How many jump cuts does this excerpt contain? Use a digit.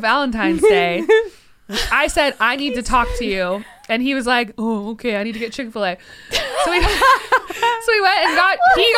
0